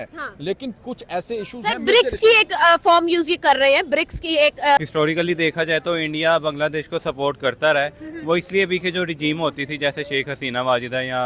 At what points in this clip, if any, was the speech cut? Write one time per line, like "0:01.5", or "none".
0:04.8